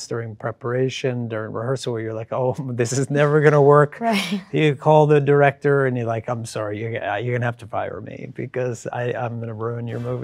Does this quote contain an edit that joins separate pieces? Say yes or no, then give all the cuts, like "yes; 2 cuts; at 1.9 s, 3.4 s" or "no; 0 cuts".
no; 0 cuts